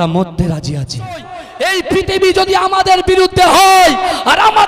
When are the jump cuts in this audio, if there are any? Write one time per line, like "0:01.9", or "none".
0:01.4